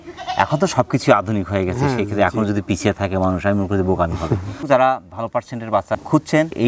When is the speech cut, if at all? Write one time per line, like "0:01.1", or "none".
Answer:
none

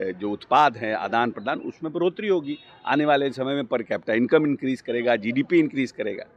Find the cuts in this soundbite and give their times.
none

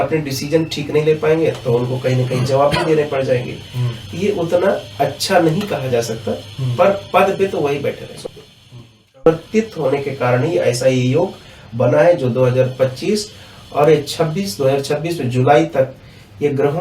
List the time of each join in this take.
0:09.3

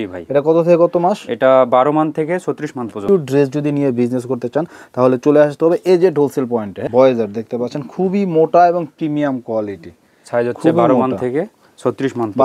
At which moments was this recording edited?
0:03.0
0:06.8

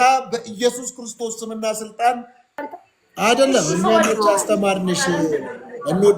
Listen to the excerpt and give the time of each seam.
0:02.6

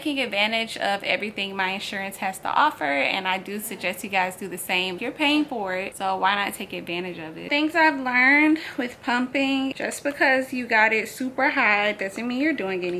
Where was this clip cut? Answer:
0:05.0
0:05.9
0:07.5
0:09.8

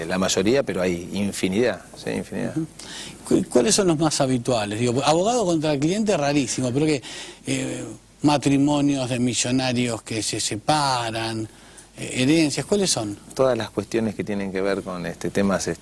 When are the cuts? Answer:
0:03.8

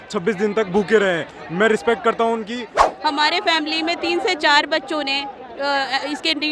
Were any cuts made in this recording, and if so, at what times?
0:02.7

